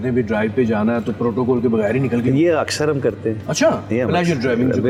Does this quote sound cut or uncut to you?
uncut